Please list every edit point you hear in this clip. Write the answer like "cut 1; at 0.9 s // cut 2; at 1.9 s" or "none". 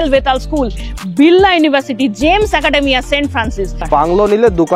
cut 1; at 3.8 s